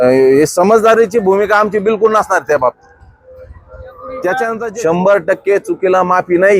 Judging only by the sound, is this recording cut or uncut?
cut